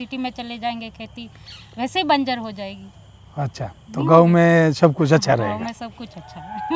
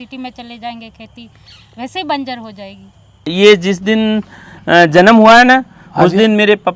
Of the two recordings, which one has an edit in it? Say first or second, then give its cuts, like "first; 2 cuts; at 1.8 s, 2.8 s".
second; 1 cut; at 3.3 s